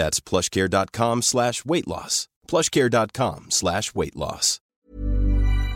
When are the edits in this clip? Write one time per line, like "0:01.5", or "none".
0:04.8